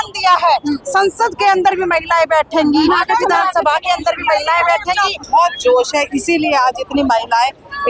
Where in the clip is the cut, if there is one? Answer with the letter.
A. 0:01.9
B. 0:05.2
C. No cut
B